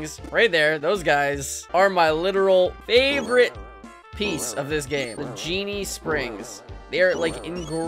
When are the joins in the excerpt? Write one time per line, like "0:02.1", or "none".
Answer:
0:01.5
0:02.8
0:04.9